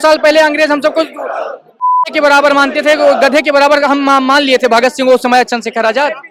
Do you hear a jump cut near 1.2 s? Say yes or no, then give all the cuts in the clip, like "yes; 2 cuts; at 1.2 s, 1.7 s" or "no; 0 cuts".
no; 0 cuts